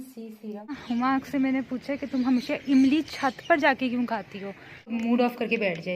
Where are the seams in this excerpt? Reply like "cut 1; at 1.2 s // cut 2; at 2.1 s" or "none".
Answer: cut 1; at 0.8 s // cut 2; at 4.9 s